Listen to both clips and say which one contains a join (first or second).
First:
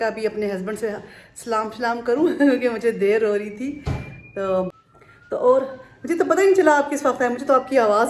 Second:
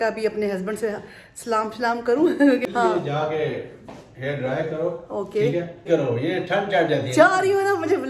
second